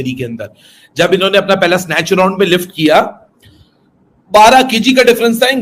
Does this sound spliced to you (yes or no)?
no